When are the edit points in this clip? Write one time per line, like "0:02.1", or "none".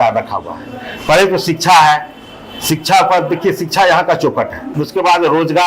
0:04.6